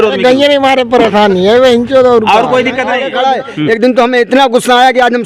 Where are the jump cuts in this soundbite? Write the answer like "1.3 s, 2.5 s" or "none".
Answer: 3.1 s